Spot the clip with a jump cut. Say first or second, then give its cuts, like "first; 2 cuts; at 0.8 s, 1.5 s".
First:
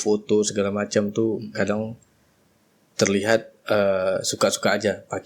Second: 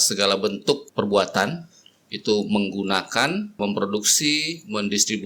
second; 2 cuts; at 0.9 s, 3.6 s